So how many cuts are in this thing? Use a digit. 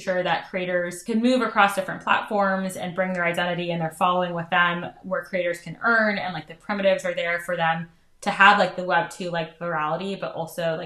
1